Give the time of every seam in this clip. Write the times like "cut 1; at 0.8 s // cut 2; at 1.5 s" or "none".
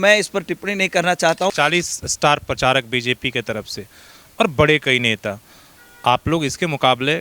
cut 1; at 1.5 s